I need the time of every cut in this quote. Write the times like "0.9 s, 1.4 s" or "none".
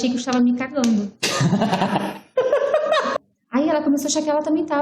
3.1 s